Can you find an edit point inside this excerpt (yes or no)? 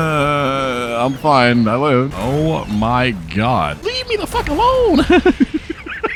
no